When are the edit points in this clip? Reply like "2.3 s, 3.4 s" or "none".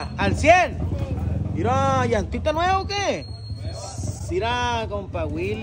none